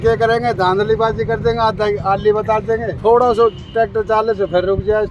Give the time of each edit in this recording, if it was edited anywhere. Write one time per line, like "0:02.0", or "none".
0:02.9